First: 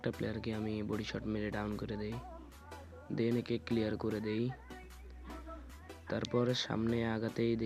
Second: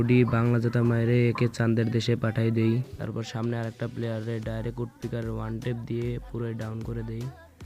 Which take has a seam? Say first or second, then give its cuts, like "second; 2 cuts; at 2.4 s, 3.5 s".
second; 1 cut; at 2.9 s